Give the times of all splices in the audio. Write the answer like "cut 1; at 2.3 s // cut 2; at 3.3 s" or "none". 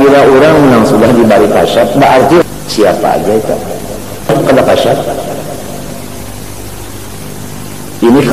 cut 1; at 2.4 s // cut 2; at 4.3 s